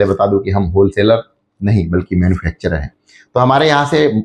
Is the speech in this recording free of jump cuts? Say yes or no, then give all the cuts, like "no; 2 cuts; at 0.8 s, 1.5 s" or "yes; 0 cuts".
yes; 0 cuts